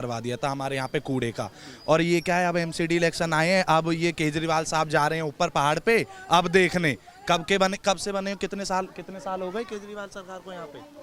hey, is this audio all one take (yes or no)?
yes